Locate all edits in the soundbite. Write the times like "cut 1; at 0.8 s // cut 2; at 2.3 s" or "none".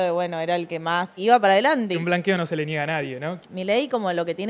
cut 1; at 1.2 s // cut 2; at 2.0 s // cut 3; at 3.4 s